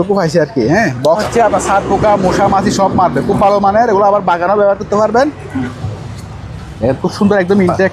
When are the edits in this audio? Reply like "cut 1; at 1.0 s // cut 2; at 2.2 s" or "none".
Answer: cut 1; at 1.2 s // cut 2; at 5.8 s